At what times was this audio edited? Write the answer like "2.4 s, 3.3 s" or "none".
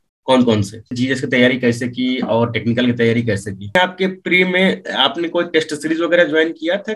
0.9 s, 3.7 s